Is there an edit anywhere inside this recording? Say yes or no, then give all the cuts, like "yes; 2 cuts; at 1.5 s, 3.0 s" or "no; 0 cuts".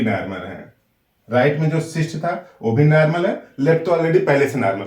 no; 0 cuts